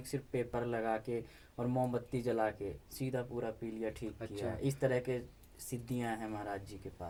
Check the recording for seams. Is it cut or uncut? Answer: uncut